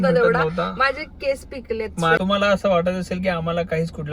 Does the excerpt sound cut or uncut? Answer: cut